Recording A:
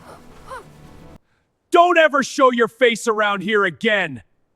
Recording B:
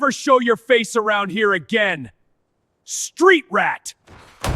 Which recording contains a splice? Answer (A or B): A